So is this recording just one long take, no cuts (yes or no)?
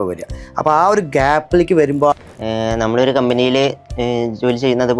no